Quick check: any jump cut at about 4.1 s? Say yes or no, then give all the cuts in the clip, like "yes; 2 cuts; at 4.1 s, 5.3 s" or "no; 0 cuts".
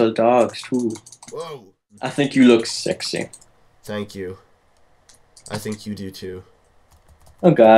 no; 1 cut; at 2.1 s